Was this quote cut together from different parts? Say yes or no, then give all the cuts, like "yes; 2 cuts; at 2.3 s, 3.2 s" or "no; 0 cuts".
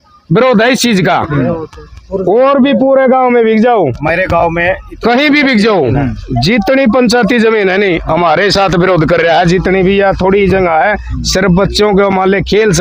no; 0 cuts